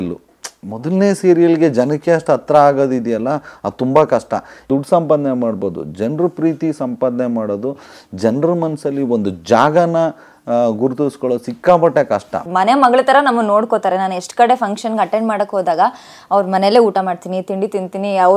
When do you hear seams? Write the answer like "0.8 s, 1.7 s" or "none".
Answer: 4.7 s, 12.5 s